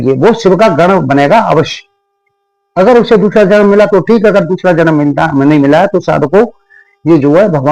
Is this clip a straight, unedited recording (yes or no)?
yes